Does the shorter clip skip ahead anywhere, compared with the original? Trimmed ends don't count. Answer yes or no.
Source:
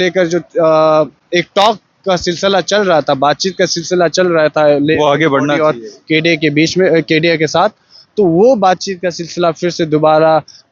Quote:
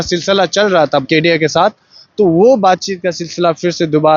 yes